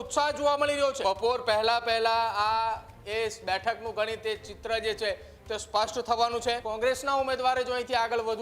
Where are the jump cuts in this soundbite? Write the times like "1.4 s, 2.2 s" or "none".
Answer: 1.0 s, 6.7 s

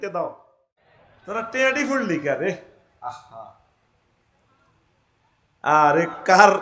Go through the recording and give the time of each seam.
0.9 s

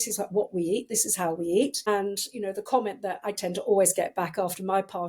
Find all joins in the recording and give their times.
1.8 s

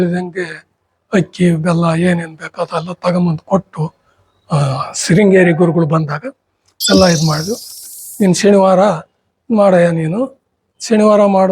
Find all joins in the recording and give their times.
7.8 s

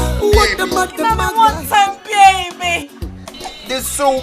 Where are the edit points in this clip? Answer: 1.0 s

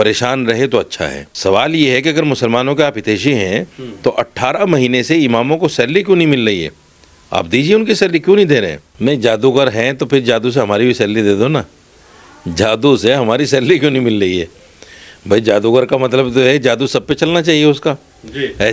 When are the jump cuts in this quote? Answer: 1.2 s, 8.8 s

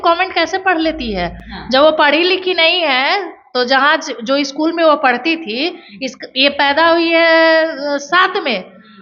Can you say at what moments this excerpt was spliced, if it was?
none

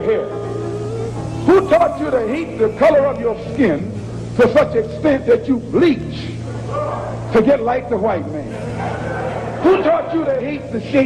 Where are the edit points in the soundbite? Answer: none

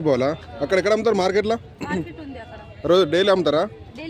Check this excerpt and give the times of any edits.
none

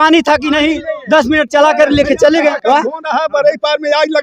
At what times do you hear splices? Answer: 2.6 s

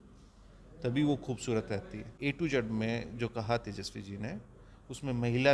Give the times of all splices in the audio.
2.2 s

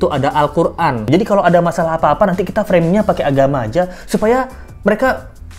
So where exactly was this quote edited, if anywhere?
1.0 s

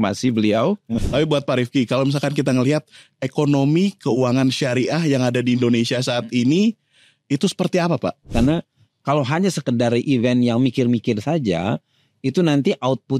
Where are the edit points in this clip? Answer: 0.9 s, 8.2 s

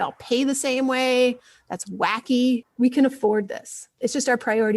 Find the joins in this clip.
2.7 s, 3.9 s

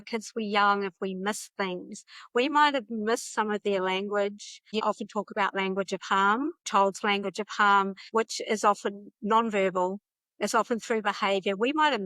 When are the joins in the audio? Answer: 4.7 s, 6.6 s, 8.0 s

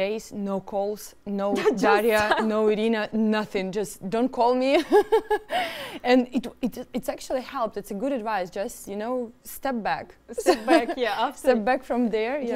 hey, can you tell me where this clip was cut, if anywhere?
none

